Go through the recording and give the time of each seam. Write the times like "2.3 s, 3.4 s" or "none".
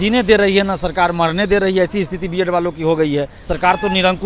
3.4 s